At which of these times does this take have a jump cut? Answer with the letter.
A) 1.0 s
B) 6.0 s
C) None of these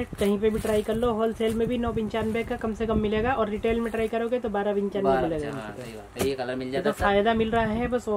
C